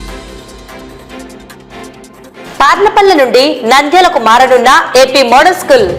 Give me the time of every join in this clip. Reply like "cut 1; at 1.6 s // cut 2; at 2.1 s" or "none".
none